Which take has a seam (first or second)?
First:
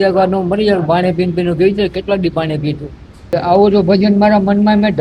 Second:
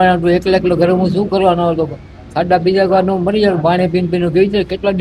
first